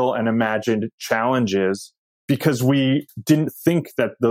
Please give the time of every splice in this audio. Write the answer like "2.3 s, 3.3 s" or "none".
2.1 s